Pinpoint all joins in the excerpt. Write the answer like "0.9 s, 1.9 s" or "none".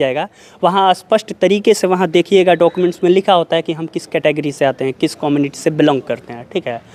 none